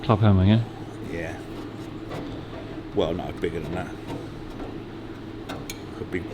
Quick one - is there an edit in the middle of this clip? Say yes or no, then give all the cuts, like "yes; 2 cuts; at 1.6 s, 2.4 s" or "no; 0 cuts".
no; 0 cuts